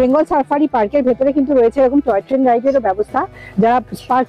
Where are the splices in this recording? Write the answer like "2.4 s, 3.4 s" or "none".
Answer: none